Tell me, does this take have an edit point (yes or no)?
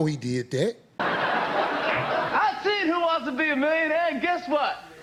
no